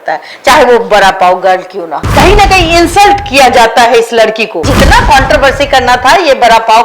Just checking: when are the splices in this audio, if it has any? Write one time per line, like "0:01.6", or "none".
0:02.1
0:04.7